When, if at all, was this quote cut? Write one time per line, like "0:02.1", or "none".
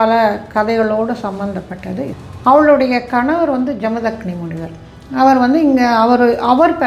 0:02.2